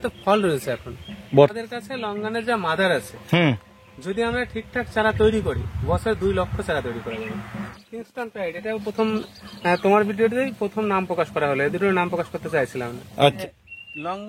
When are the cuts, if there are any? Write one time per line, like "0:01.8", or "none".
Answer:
0:01.5
0:07.8
0:13.4